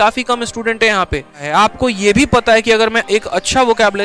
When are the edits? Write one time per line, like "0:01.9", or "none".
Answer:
0:01.4